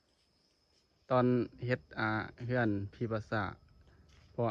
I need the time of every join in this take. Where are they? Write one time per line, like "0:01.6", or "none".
none